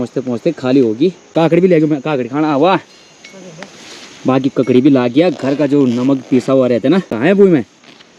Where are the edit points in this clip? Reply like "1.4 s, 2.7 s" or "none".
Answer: 1.2 s, 7.1 s

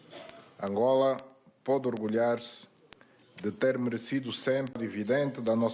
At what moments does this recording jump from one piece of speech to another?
4.8 s

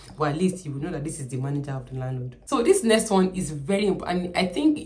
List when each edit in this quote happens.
2.4 s

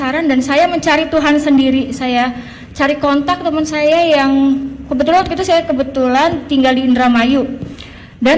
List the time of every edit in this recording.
none

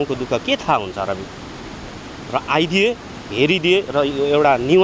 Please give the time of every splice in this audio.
none

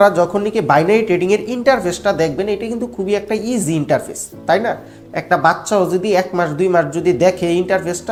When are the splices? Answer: none

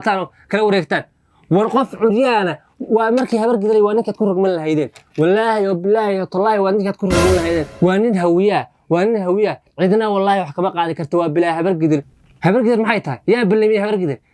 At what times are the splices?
7.7 s, 12.2 s

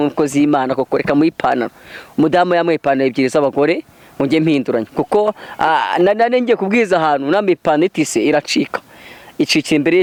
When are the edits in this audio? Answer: none

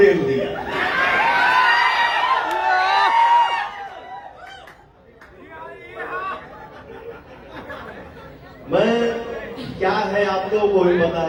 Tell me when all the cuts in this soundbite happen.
none

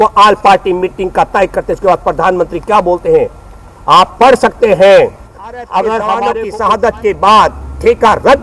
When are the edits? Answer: 6.3 s

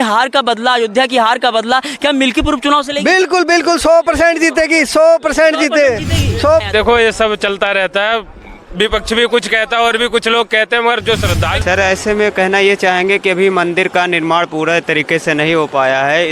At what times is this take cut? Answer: 6.6 s, 11.6 s

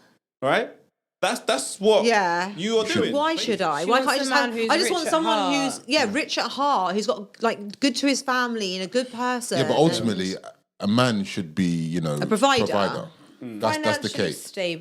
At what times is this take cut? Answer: 3.0 s

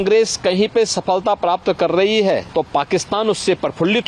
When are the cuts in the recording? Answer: 2.5 s

